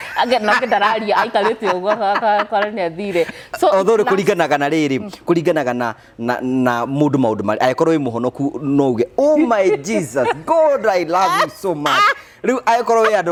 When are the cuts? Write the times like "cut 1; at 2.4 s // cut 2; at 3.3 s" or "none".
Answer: none